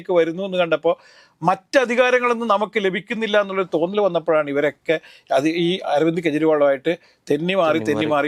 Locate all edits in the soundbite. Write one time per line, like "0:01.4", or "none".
none